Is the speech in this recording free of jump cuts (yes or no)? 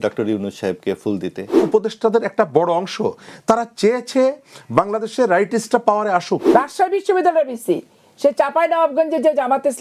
no